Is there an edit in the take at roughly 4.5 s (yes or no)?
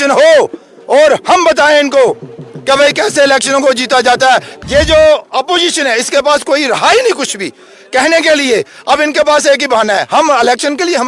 yes